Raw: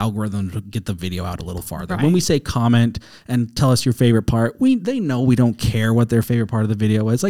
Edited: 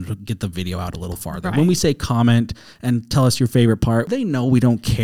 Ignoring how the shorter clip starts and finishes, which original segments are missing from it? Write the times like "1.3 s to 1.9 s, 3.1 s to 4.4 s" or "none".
4.5 s to 4.8 s